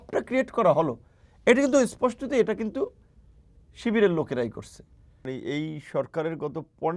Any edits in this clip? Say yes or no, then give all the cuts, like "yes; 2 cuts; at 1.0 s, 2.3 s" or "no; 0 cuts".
yes; 1 cut; at 5.3 s